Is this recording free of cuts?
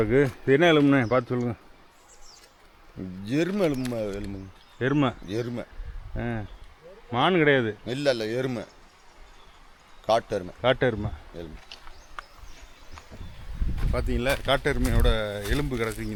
yes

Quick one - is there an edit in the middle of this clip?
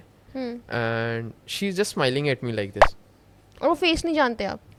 no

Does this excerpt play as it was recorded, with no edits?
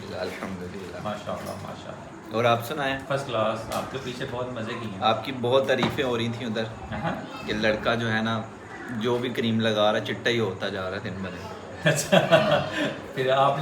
no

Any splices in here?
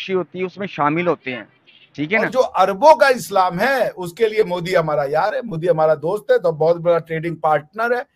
yes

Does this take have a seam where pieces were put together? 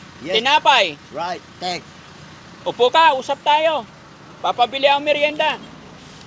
no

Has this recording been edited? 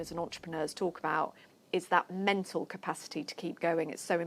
no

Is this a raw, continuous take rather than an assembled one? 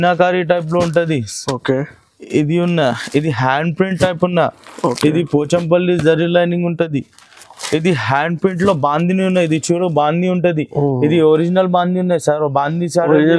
yes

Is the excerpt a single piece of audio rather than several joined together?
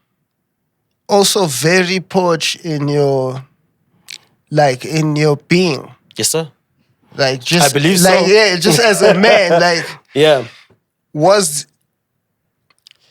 yes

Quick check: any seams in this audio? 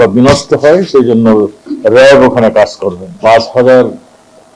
yes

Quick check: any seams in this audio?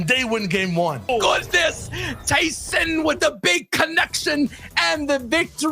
yes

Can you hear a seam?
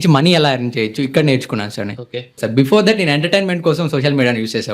yes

